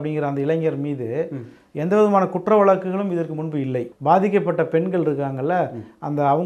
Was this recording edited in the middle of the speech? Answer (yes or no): yes